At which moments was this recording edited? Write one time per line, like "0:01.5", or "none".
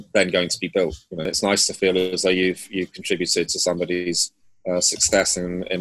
0:01.3